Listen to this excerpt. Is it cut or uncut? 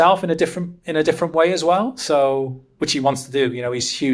uncut